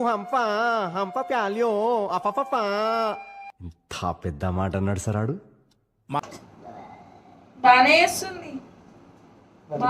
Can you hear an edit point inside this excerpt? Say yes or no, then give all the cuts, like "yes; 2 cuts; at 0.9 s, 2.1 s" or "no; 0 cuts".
yes; 1 cut; at 6.3 s